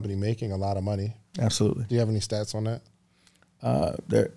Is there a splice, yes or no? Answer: no